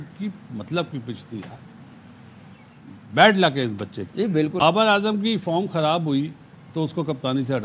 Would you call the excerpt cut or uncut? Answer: cut